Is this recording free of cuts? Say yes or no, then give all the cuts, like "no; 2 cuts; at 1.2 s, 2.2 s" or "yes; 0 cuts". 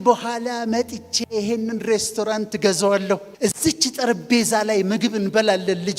no; 1 cut; at 3.3 s